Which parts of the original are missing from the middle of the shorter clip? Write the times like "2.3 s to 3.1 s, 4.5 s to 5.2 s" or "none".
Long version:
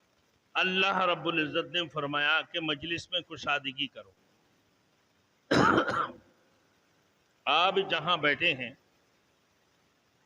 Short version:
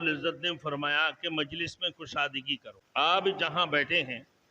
4.1 s to 7.3 s